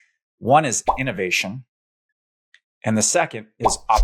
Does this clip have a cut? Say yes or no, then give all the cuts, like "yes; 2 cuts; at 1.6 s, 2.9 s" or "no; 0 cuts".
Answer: no; 0 cuts